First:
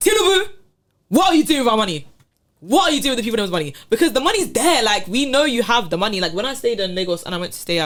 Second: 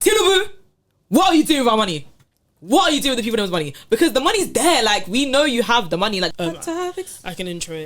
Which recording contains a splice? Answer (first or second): second